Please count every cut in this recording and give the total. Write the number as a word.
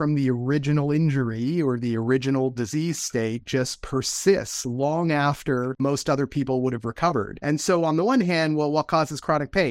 two